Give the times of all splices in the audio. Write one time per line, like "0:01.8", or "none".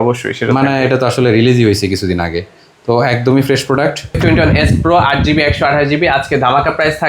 0:04.2